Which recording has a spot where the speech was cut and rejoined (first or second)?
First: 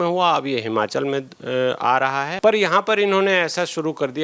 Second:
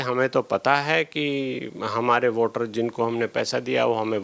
first